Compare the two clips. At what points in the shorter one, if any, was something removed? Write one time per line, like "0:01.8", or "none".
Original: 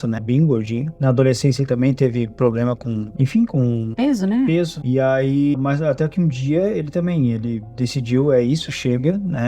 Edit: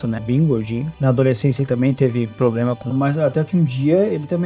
0:02.9